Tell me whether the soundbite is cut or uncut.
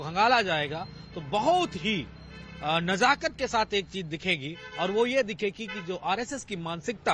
uncut